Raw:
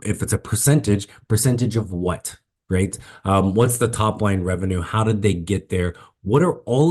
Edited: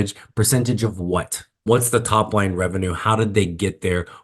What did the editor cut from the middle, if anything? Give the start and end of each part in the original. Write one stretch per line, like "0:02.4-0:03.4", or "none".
0:02.6-0:03.5